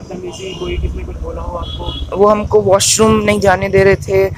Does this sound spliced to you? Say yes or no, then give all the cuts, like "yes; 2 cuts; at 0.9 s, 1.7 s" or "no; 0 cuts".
no; 0 cuts